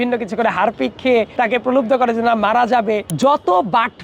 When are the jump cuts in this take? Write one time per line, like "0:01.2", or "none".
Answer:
0:01.3
0:03.1